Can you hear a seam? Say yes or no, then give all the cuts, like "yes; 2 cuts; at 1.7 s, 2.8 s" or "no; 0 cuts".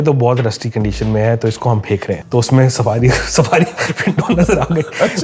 yes; 1 cut; at 2.2 s